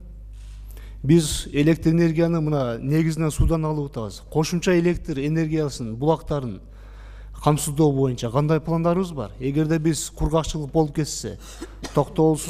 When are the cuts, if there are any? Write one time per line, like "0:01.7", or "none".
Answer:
none